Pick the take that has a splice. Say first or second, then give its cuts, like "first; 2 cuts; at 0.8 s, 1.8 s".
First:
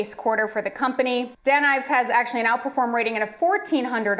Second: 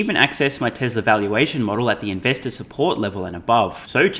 first; 1 cut; at 1.3 s